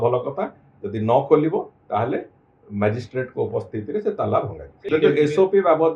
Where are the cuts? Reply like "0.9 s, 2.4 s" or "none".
4.7 s

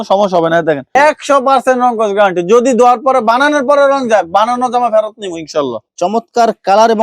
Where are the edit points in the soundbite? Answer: 1.0 s, 5.9 s

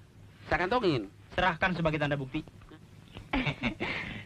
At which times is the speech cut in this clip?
2.7 s

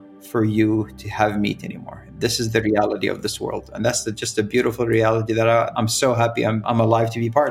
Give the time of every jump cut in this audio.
5.7 s, 6.6 s

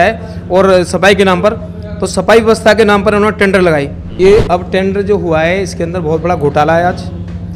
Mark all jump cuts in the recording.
4.0 s

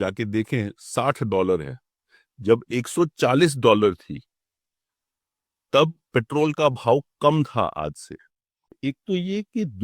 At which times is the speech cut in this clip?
8.8 s

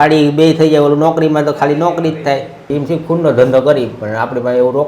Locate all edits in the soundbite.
2.8 s

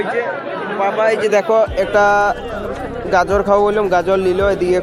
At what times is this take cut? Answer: none

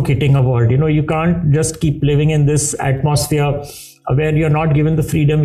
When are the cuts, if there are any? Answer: none

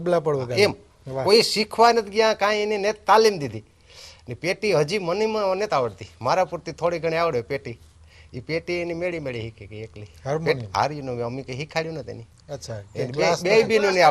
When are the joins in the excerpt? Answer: none

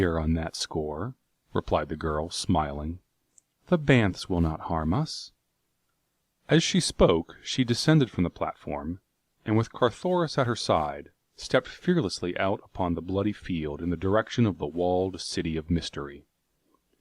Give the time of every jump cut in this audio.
none

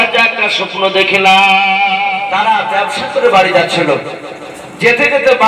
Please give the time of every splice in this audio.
2.1 s

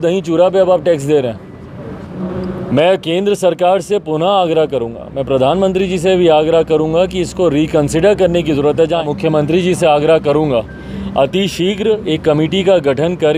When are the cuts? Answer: 2.2 s, 9.0 s

